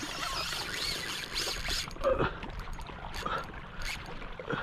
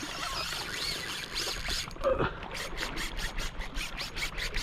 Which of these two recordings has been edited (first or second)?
second